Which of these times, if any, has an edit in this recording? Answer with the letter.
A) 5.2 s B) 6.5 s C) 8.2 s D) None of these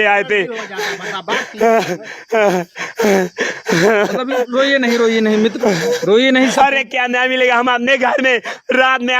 B